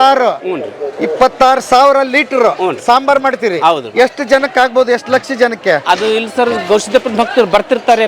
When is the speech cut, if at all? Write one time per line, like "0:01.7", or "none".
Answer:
none